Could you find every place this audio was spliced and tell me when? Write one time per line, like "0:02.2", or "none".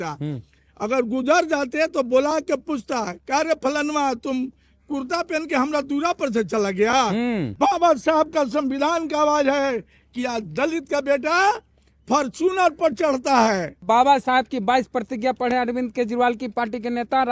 0:07.5
0:13.8